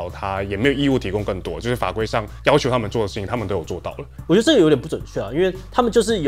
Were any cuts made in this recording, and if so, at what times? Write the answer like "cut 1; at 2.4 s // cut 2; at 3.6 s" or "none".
cut 1; at 4.0 s